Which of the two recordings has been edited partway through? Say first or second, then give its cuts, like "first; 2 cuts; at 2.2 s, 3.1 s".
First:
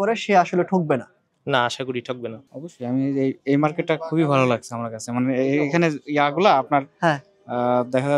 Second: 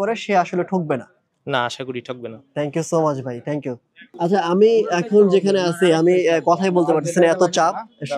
first; 1 cut; at 2.4 s